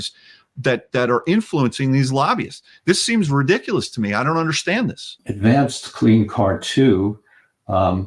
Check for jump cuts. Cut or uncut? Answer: cut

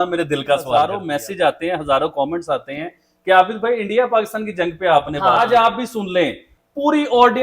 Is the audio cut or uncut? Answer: cut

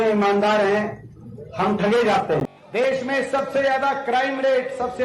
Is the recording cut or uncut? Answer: cut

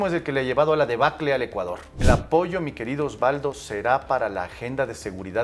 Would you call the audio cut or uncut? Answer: cut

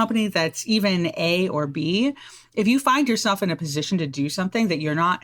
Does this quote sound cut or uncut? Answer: uncut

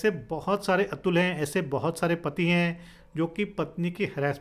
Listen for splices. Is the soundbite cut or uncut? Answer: uncut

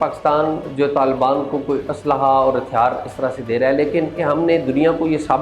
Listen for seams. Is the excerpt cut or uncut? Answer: cut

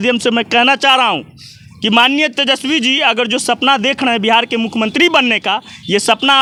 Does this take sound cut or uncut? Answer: uncut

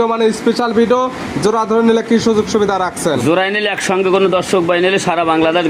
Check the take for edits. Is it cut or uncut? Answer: uncut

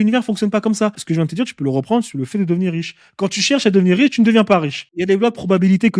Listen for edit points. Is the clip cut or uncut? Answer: cut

